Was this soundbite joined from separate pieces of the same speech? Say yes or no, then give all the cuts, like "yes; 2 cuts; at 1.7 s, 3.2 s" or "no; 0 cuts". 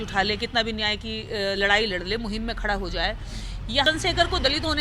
yes; 1 cut; at 3.9 s